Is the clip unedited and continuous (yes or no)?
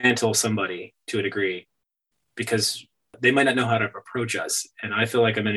no